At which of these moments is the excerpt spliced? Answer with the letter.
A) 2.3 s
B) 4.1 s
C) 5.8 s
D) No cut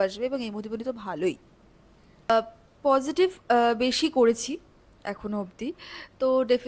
A